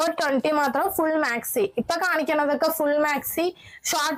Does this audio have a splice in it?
no; 0 cuts

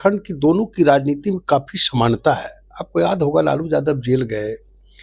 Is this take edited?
no; 0 cuts

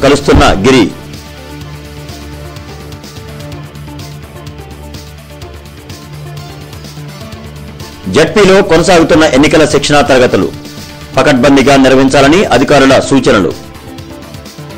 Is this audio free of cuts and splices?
no; 1 cut; at 0.9 s

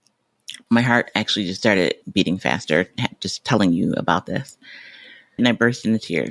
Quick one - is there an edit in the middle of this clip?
yes; 2 cuts; at 2.0 s, 5.4 s

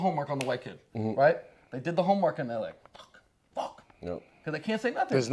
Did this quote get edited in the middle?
yes; 1 cut; at 3.5 s

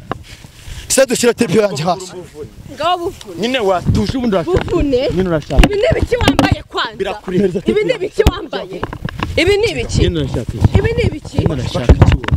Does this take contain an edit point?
no; 0 cuts

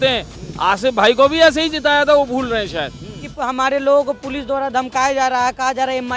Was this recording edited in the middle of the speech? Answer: yes; 1 cut; at 3.3 s

